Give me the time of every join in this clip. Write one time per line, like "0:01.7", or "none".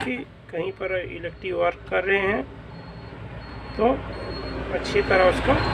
none